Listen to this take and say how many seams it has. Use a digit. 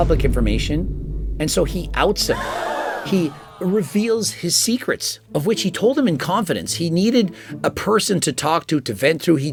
0